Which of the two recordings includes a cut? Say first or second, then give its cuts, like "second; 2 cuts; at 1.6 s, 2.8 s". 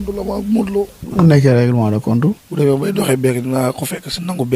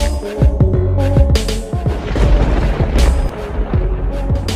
first; 2 cuts; at 1.0 s, 2.5 s